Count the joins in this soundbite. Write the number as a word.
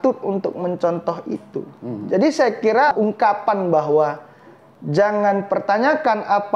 one